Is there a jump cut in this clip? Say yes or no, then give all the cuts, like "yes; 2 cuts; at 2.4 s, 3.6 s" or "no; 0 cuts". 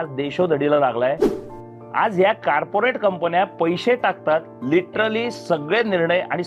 yes; 1 cut; at 1.3 s